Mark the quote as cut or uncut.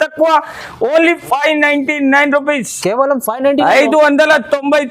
uncut